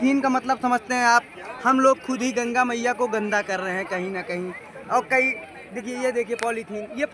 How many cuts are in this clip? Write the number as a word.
zero